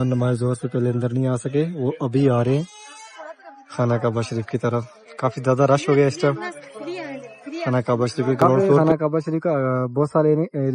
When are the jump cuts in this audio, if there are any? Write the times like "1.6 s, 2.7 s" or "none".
8.8 s